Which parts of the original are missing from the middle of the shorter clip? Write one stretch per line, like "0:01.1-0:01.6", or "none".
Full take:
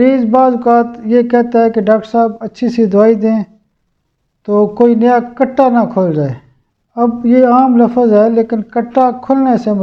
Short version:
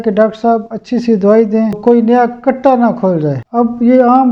0:03.5-0:04.7
0:06.4-0:06.9